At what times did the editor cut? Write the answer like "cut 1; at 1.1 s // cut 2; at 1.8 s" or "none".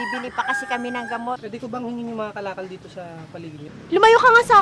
cut 1; at 1.4 s // cut 2; at 3.7 s